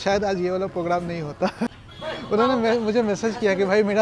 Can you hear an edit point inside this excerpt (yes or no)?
yes